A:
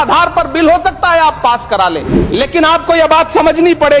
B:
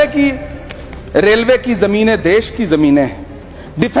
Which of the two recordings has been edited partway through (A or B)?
A